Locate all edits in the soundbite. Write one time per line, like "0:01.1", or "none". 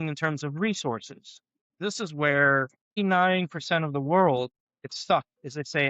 0:01.8
0:03.0
0:05.0

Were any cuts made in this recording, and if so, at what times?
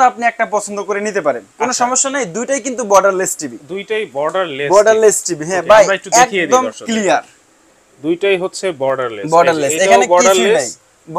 none

